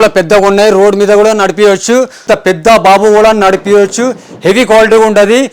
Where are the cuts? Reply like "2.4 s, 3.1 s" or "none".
2.2 s

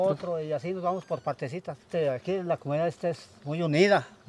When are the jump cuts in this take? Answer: 1.9 s

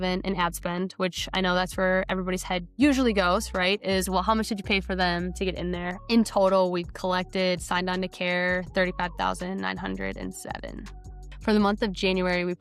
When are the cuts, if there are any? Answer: 5.9 s

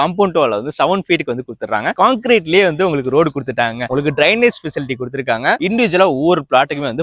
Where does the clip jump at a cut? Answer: 1.9 s, 3.9 s, 5.6 s

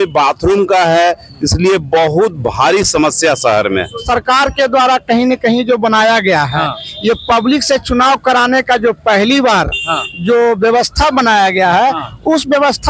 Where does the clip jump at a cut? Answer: 4.0 s

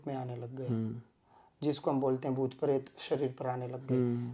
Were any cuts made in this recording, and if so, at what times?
none

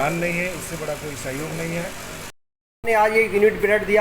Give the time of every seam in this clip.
2.2 s

